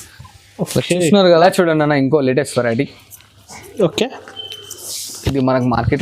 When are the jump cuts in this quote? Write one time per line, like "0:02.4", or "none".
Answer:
0:01.5